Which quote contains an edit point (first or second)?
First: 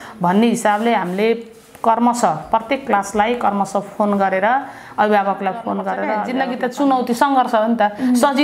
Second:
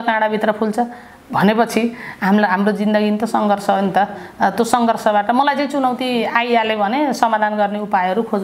first